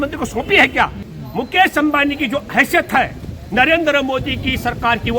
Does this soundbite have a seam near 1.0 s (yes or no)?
yes